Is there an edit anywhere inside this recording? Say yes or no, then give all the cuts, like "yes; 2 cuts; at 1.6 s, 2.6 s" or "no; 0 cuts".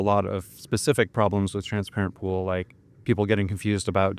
no; 0 cuts